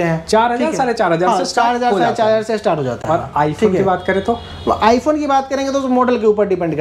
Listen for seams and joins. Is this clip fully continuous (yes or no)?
yes